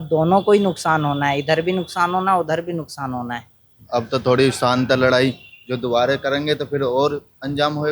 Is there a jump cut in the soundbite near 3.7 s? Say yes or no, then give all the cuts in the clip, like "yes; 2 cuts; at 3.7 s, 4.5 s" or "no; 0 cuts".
yes; 1 cut; at 3.7 s